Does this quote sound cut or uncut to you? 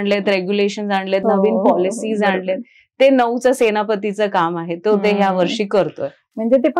uncut